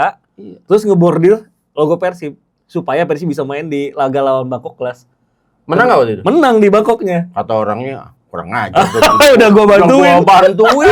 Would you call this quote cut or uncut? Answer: uncut